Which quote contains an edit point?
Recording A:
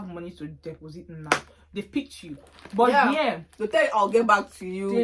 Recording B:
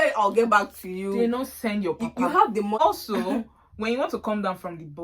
B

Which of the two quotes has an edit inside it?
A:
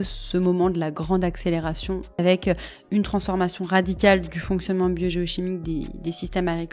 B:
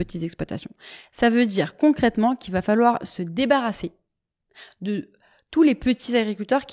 A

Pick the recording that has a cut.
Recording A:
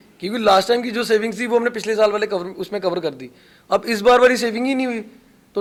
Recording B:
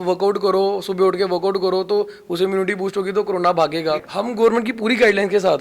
B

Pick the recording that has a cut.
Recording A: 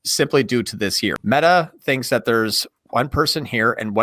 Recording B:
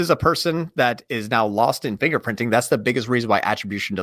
A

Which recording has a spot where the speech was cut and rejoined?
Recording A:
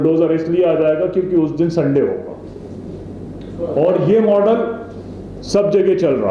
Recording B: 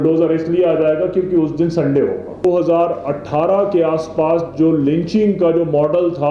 B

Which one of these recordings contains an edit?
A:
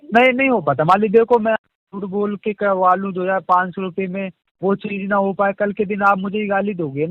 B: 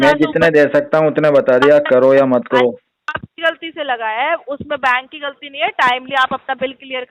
B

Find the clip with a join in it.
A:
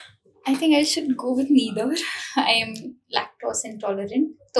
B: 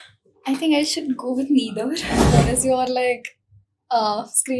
B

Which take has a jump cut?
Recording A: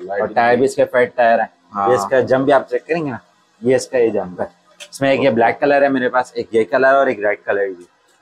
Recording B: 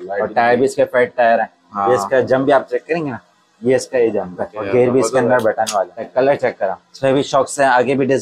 B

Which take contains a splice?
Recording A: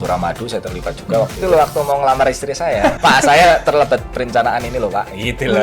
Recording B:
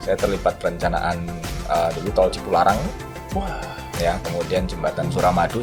A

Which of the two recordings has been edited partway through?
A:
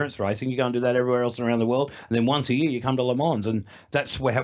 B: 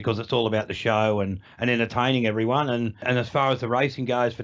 B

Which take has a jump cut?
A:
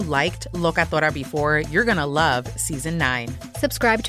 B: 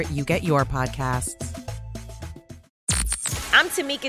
B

